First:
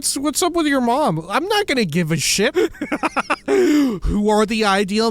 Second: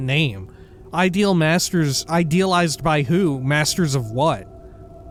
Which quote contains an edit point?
first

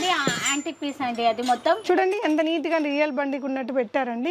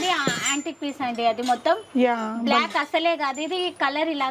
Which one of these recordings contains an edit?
first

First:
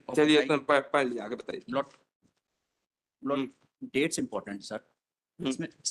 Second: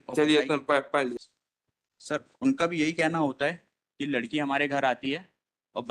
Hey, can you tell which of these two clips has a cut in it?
second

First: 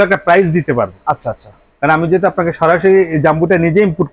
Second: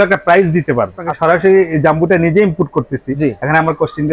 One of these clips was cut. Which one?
second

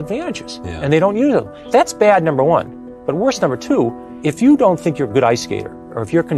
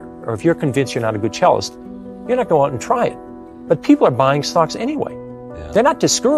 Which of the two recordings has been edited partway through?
first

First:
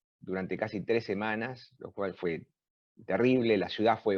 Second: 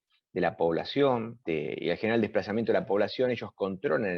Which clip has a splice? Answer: second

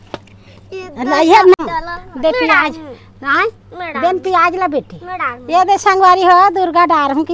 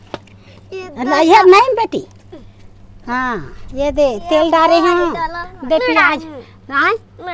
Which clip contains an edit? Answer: first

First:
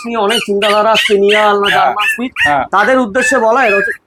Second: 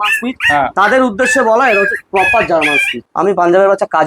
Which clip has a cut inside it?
second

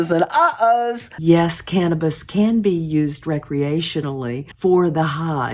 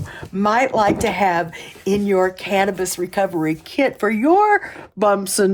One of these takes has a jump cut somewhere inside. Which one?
first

